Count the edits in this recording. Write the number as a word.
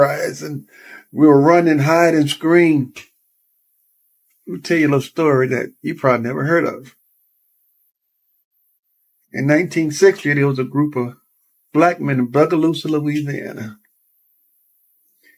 zero